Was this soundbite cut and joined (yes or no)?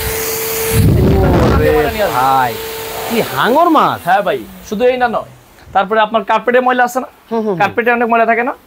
no